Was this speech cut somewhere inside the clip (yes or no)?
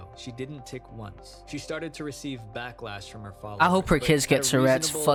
no